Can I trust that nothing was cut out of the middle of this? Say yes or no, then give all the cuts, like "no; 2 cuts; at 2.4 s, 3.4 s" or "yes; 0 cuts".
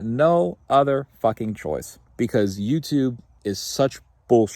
no; 2 cuts; at 2.0 s, 3.3 s